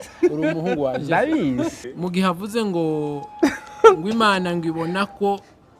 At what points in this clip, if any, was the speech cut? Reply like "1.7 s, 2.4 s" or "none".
1.9 s